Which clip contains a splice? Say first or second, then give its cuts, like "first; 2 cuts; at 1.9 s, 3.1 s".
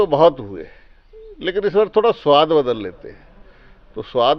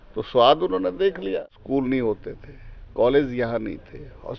second; 1 cut; at 1.5 s